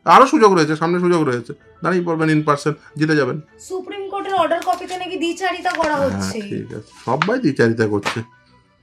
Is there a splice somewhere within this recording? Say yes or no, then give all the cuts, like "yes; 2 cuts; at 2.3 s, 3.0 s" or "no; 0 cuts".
no; 0 cuts